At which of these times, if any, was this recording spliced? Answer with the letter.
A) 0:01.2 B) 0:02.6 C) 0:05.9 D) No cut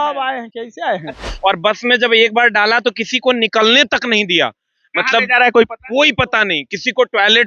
A